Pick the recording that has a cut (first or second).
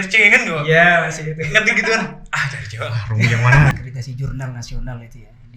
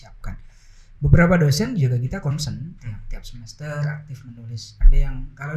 first